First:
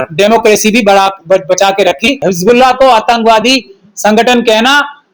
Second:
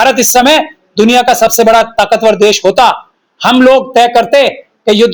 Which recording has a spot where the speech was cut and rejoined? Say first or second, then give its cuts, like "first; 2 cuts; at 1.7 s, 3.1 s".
first; 1 cut; at 2.2 s